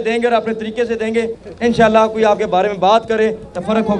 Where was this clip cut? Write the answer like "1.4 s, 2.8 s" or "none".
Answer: 1.4 s